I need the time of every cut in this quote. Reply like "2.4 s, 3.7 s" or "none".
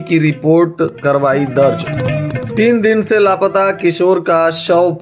none

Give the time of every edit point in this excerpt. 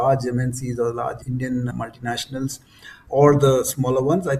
none

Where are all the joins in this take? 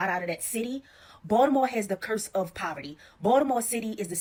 none

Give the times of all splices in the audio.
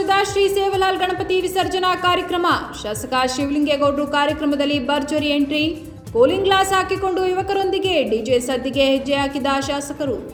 none

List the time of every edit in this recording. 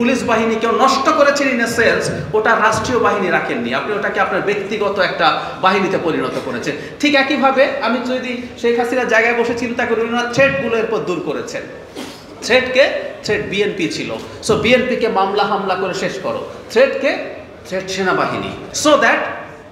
18.7 s

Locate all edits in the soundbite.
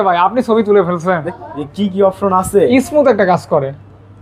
1.3 s

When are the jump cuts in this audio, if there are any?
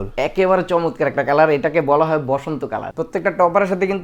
2.8 s

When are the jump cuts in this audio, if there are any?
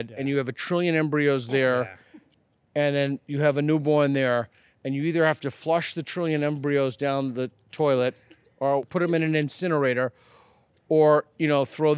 8.9 s

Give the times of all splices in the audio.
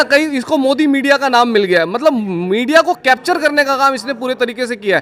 none

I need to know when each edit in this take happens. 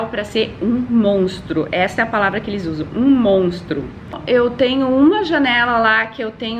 4.2 s

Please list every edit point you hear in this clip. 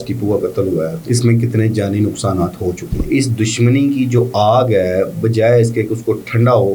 1.0 s, 3.1 s

